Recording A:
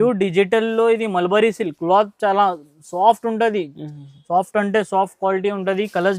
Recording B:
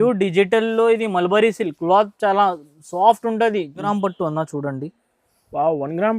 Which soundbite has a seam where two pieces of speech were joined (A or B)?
B